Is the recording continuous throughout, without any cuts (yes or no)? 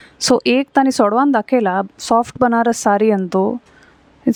yes